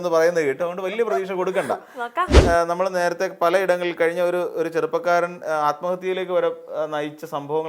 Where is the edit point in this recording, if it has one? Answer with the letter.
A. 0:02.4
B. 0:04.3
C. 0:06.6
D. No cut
A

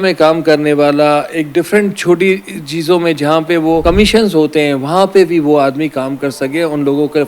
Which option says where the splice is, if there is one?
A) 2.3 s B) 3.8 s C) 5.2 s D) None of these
B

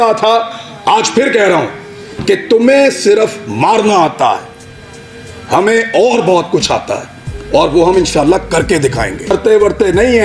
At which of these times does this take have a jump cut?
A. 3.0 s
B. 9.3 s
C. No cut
B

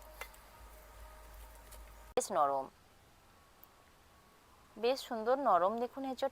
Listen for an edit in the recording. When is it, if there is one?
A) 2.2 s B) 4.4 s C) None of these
A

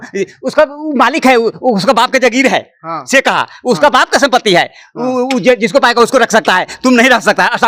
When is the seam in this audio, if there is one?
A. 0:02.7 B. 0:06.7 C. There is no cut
C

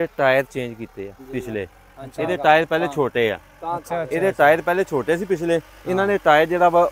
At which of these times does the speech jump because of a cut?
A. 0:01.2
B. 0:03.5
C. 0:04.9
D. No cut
A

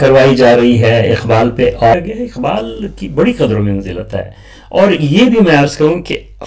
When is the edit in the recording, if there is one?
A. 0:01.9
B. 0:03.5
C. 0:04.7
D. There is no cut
A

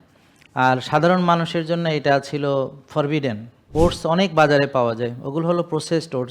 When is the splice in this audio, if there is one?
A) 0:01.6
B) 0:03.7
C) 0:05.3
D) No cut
B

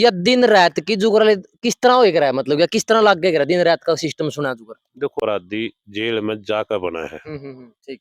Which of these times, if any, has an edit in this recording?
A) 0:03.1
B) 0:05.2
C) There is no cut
B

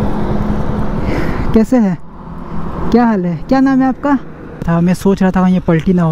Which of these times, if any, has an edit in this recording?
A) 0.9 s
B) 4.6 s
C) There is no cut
B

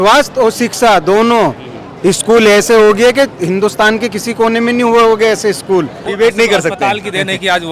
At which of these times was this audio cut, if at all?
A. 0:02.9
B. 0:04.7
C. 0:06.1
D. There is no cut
C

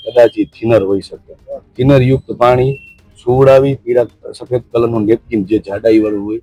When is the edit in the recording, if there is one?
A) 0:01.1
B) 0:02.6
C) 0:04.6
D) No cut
D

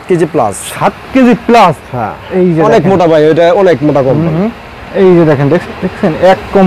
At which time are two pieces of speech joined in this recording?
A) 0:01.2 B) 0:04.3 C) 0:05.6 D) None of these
C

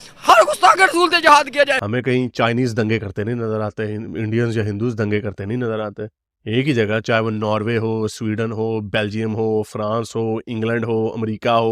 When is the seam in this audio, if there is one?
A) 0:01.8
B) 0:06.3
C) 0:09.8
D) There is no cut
A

